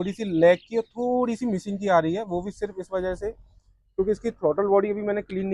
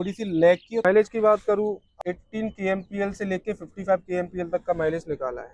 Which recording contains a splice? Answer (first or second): second